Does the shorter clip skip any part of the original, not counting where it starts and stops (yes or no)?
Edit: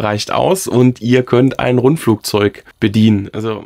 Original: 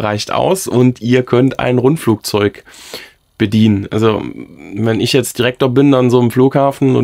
yes